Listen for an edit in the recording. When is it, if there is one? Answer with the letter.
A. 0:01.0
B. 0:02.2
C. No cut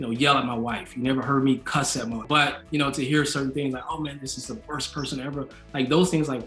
B